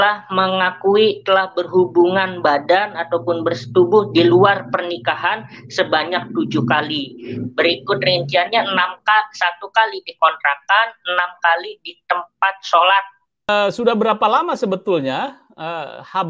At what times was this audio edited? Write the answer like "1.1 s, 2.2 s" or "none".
13.5 s